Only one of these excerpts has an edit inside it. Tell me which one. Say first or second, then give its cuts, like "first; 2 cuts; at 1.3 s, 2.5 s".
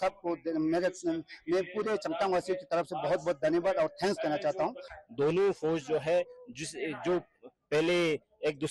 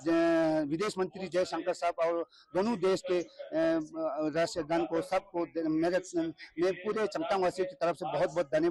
first; 1 cut; at 4.9 s